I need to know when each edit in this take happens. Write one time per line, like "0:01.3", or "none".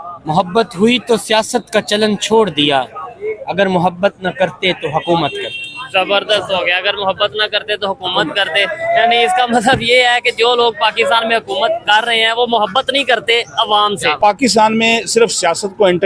0:14.1